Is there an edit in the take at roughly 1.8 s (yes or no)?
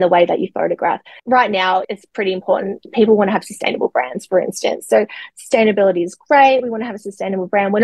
yes